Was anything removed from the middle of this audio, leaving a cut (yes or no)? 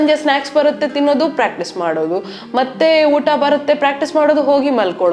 no